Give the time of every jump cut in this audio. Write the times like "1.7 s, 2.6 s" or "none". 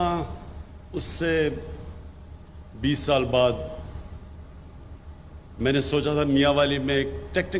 3.3 s, 5.4 s